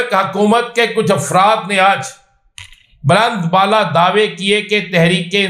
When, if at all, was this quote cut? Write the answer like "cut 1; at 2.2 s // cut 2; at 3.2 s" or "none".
none